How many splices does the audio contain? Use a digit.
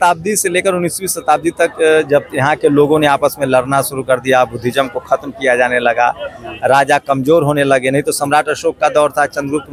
0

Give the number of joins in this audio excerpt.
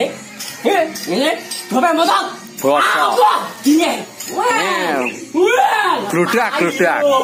0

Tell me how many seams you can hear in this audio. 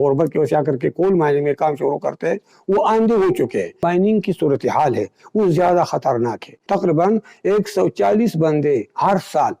2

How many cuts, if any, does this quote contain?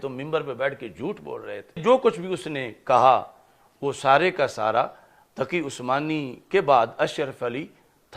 1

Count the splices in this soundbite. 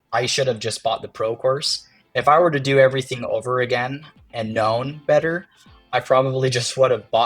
1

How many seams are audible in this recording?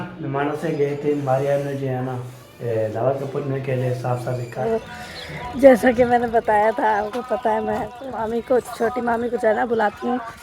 2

